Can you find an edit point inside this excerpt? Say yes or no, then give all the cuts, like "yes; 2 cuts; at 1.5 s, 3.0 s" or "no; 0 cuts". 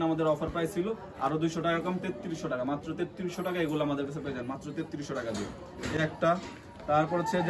no; 0 cuts